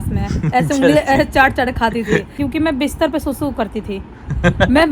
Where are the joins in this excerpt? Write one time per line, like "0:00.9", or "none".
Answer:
0:02.3